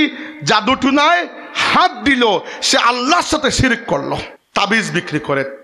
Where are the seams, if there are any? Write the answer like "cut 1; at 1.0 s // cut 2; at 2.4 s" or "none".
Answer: cut 1; at 4.4 s